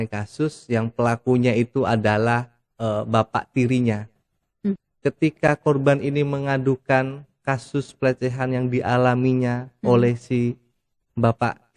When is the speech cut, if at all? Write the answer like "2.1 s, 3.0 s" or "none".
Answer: 4.8 s